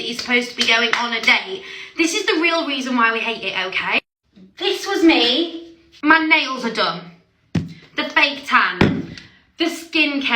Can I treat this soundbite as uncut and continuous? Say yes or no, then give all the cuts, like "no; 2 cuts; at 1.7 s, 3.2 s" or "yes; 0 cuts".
no; 1 cut; at 5.9 s